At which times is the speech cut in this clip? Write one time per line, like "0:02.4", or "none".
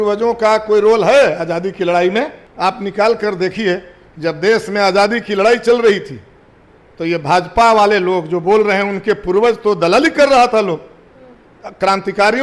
0:02.4